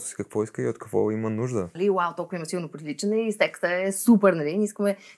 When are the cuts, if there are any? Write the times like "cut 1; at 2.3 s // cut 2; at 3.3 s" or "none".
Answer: cut 1; at 1.7 s